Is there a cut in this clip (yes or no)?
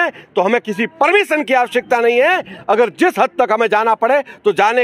no